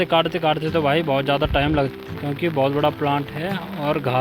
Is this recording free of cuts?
yes; 0 cuts

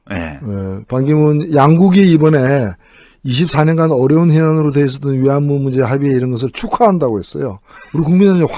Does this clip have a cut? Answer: no; 0 cuts

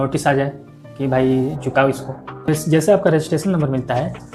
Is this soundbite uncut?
no; 1 cut; at 2.5 s

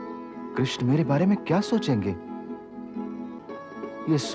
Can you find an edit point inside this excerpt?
no; 0 cuts

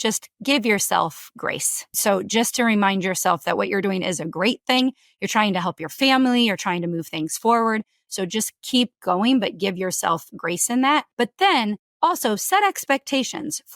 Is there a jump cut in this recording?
yes; 2 cuts; at 2.0 s, 11.1 s

